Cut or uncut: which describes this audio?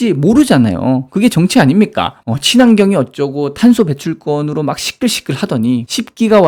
uncut